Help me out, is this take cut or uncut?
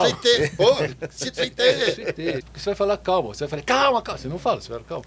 cut